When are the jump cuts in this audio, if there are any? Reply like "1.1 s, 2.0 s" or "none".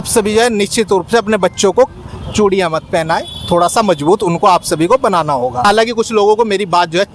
5.6 s